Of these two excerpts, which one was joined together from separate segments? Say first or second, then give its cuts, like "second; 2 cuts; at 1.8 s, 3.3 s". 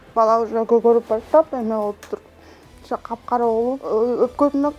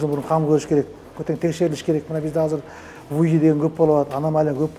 first; 1 cut; at 3.8 s